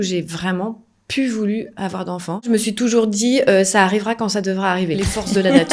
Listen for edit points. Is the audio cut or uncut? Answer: cut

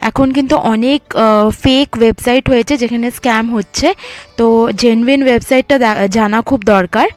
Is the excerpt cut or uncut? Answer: uncut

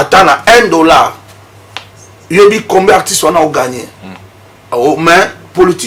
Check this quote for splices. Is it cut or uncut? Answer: uncut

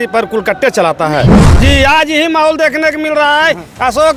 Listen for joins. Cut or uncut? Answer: cut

